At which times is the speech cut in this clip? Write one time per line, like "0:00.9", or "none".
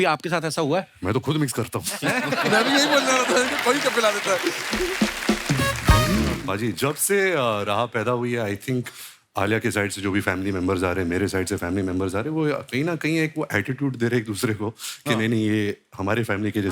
0:06.4